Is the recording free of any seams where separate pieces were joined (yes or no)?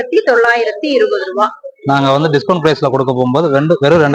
yes